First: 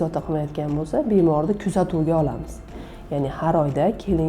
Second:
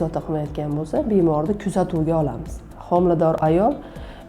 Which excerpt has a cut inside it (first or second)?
second